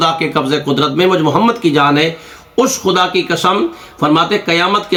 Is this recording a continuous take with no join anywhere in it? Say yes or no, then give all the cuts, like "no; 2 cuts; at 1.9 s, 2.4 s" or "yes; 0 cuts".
yes; 0 cuts